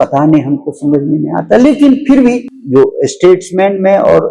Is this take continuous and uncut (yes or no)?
no